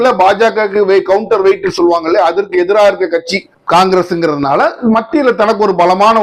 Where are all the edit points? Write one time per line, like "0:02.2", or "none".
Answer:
none